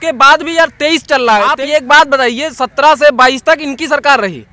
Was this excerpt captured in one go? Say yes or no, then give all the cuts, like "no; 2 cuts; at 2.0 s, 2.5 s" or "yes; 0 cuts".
no; 1 cut; at 1.5 s